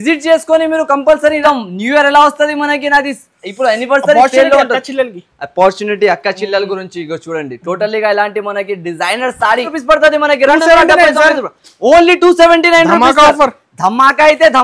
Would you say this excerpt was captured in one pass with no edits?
no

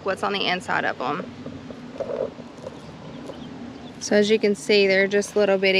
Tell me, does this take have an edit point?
no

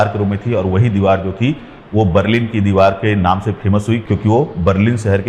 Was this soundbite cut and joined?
no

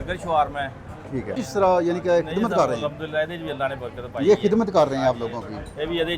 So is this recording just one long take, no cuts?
no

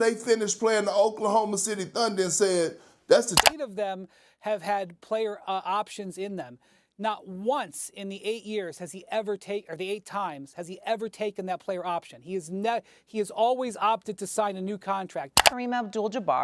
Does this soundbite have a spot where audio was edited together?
yes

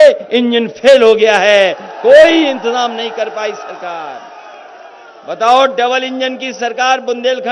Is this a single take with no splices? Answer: yes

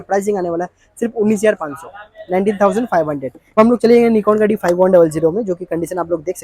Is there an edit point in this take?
yes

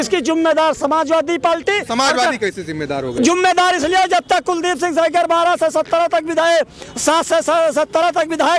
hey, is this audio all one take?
yes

